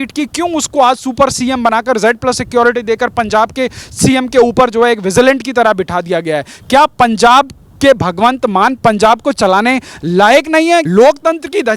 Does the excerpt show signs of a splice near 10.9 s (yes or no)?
yes